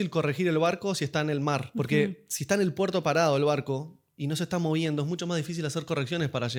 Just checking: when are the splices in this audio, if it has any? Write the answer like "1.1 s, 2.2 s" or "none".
none